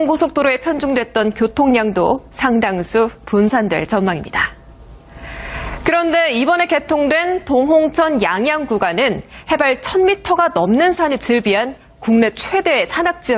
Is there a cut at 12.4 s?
no; 1 cut; at 3.9 s

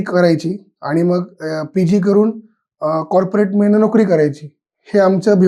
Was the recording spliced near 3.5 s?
no; 0 cuts

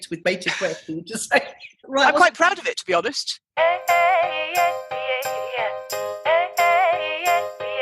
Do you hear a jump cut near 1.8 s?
yes; 2 cuts; at 1.8 s, 3.5 s

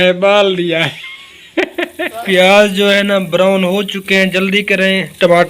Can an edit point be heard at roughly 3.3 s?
no; 1 cut; at 2.1 s

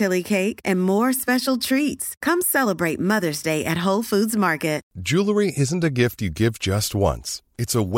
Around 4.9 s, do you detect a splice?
yes; 1 cut; at 4.9 s

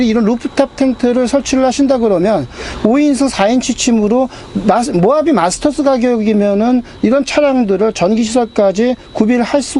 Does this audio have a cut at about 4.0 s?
no; 0 cuts

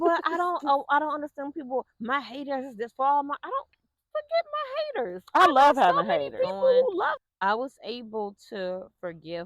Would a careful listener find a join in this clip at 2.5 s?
no; 1 cut; at 7.1 s

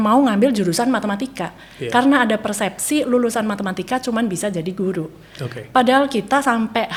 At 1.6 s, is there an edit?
no; 0 cuts

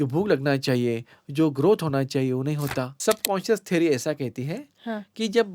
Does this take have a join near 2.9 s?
yes; 1 cut; at 2.9 s

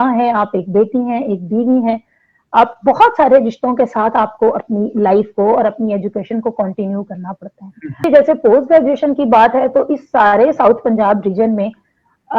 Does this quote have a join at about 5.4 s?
no; 1 cut; at 8.0 s

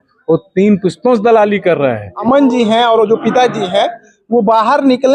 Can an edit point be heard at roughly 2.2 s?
yes; 1 cut; at 2.2 s

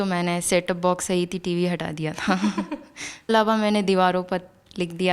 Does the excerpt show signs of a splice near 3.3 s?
yes; 1 cut; at 3.3 s

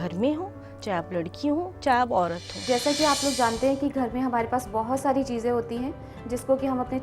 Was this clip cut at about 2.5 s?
yes; 1 cut; at 2.5 s

